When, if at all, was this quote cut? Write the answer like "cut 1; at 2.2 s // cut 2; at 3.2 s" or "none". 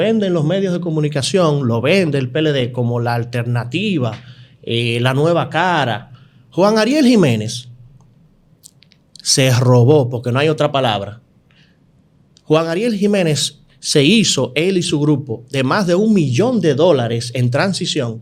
none